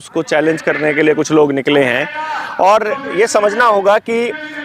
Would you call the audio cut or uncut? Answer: uncut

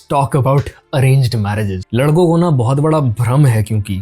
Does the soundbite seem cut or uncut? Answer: cut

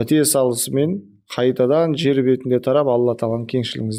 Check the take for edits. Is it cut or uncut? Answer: uncut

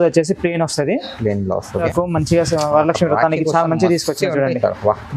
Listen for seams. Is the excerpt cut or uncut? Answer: cut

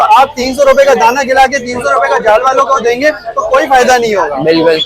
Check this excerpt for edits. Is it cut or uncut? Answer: uncut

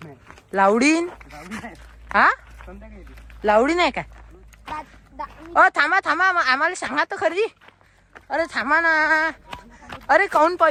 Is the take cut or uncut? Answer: uncut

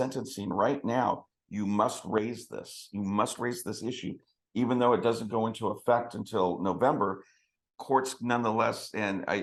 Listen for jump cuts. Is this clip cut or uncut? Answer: uncut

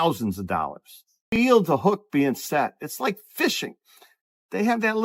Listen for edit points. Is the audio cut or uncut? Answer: cut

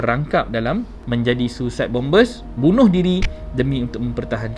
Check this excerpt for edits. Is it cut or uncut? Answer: cut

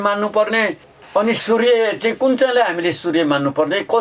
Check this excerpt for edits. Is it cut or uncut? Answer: cut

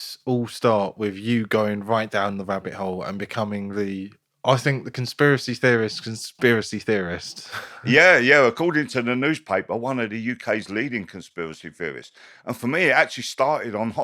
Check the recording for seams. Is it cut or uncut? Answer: uncut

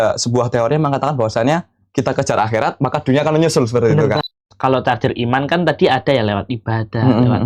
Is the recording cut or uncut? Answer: cut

